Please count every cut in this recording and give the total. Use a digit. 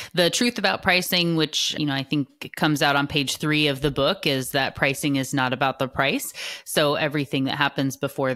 1